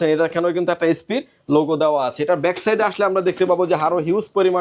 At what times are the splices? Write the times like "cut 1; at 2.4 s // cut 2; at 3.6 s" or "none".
none